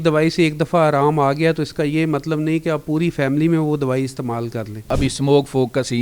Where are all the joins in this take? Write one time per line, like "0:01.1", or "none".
0:04.9